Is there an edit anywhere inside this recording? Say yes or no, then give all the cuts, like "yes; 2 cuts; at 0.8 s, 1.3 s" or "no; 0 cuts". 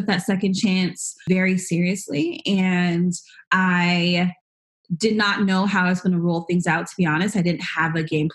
yes; 1 cut; at 1.3 s